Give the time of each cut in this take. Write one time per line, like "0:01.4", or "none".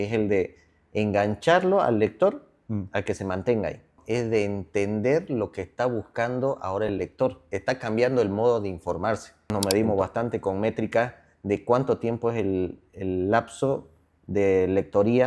0:04.0
0:07.5
0:09.5